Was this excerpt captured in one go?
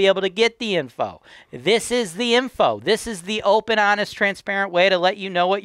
yes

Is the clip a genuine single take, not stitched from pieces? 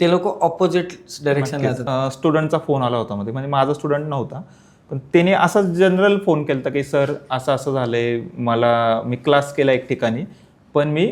no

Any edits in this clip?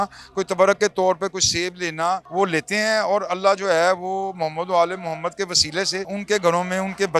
yes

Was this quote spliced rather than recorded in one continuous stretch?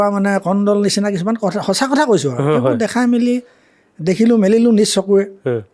no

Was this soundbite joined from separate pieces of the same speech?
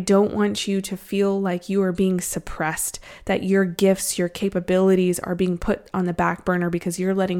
no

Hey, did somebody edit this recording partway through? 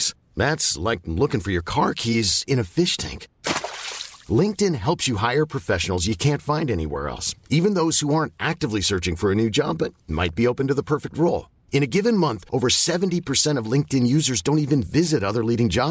no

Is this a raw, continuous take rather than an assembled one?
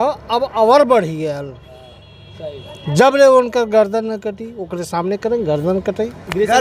yes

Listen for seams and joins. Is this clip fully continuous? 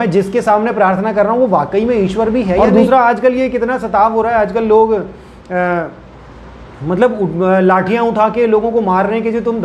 no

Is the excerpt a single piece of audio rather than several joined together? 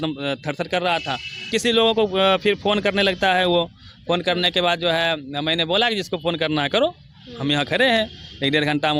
no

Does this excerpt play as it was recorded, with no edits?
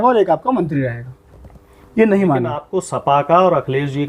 no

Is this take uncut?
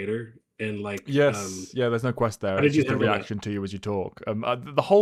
yes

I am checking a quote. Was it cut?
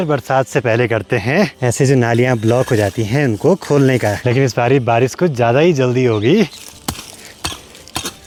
no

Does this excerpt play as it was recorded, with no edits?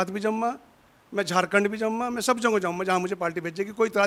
yes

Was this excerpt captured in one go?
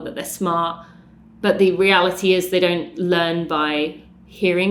yes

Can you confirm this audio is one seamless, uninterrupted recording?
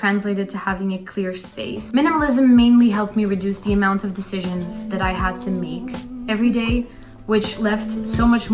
no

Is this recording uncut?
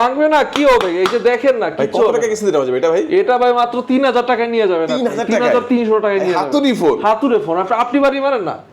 yes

